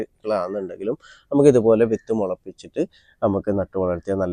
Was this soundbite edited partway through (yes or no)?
no